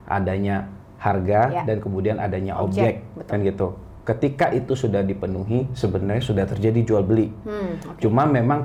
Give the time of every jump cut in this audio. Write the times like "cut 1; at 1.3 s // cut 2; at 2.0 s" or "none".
none